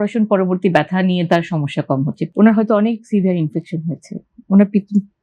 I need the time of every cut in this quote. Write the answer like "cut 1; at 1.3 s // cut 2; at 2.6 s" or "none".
cut 1; at 2.2 s